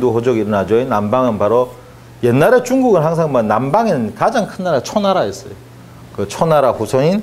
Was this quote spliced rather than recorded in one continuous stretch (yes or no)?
yes